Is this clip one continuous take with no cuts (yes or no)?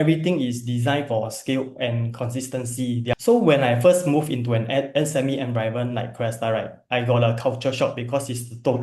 no